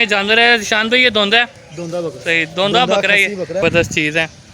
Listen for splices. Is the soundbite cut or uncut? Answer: cut